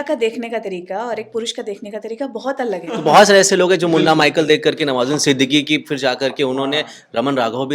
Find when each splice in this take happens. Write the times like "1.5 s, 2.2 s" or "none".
3.0 s